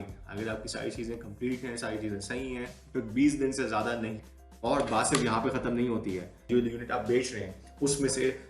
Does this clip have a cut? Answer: yes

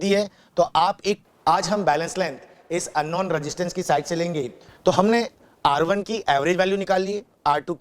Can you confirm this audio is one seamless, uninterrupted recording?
no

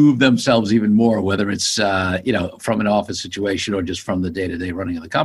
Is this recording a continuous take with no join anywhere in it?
yes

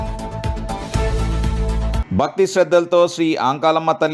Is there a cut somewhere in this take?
yes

